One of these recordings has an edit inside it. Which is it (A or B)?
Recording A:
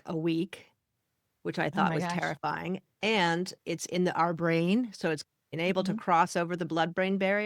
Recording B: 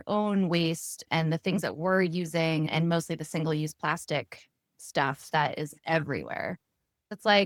A